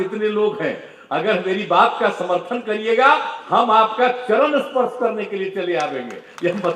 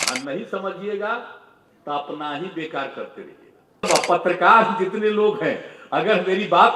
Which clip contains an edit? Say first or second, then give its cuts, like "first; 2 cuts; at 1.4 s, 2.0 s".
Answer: second; 1 cut; at 3.9 s